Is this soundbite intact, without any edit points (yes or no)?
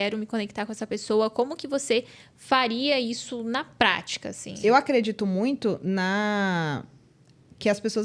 no